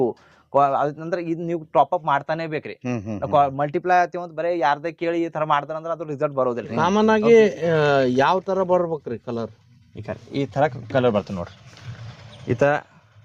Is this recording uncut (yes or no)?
no